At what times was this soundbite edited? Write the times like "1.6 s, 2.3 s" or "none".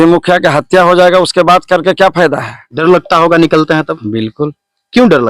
2.6 s

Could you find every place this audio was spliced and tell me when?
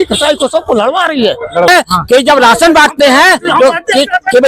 1.7 s

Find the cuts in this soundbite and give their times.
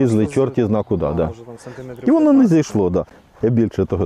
3.2 s

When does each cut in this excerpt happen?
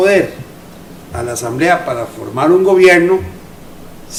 none

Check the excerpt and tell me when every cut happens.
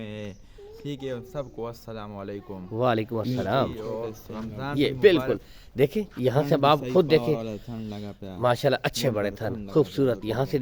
4.7 s

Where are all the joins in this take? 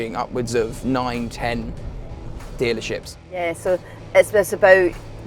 3.4 s

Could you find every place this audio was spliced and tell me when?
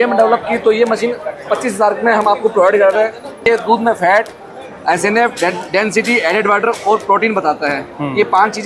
3.3 s

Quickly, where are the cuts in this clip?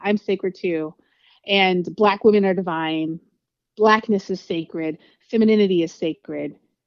none

